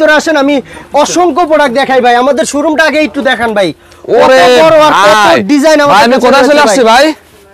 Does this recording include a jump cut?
no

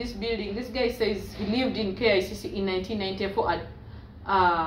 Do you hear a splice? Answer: no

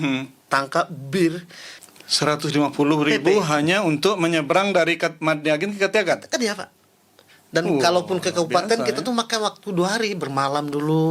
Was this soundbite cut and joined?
yes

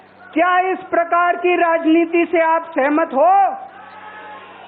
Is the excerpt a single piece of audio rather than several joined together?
yes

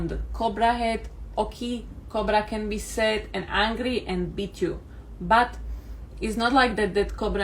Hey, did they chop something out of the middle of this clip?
no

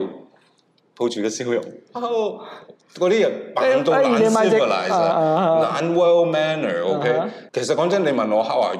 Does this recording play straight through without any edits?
no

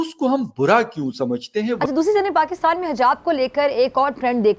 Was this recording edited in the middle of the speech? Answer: yes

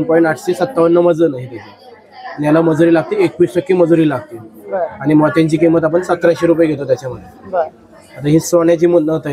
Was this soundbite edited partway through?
no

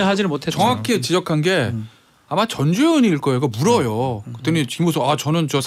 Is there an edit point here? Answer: no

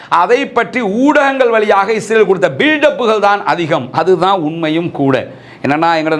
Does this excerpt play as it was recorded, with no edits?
yes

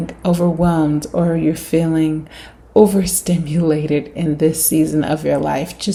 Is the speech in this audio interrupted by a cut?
no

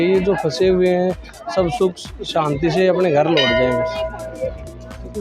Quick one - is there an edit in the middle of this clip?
no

